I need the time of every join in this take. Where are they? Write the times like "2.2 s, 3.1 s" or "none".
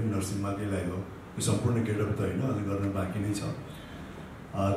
none